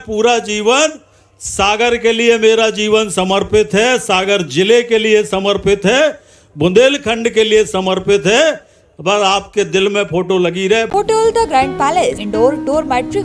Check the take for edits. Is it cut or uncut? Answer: cut